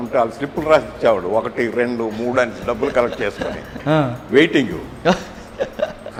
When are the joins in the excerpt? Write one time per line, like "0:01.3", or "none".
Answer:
none